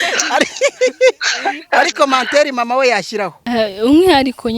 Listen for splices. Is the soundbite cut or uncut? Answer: cut